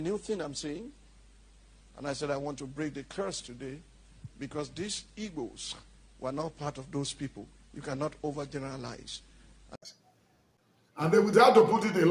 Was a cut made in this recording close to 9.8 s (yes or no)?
yes